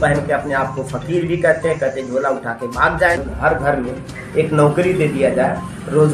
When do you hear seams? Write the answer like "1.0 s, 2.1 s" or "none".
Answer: 3.2 s